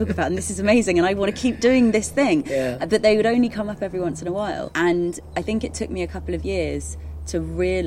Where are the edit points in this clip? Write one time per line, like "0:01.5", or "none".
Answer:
0:04.6